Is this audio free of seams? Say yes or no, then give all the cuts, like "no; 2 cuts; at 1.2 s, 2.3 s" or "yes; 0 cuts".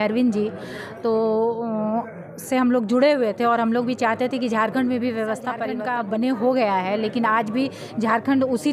no; 1 cut; at 5.7 s